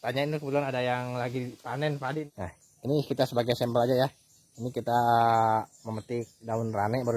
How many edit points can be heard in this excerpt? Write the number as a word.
one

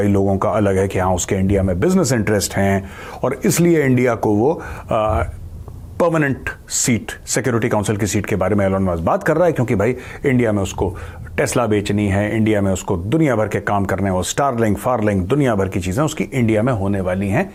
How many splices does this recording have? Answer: zero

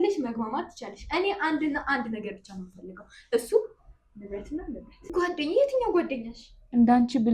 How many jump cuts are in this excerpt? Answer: one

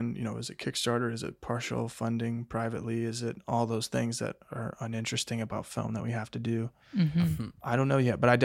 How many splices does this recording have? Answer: one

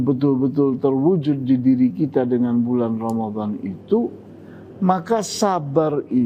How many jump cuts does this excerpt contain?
zero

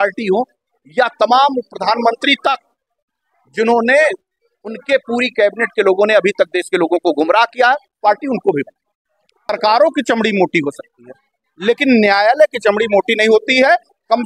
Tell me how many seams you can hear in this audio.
one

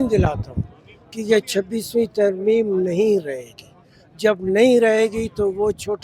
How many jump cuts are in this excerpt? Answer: zero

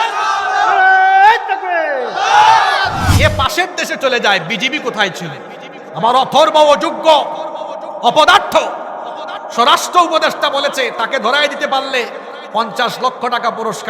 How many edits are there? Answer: one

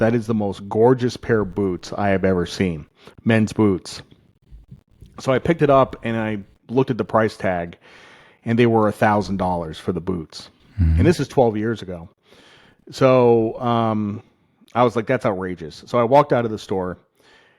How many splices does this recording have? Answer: zero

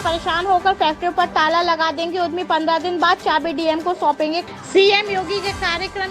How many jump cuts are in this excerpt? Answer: one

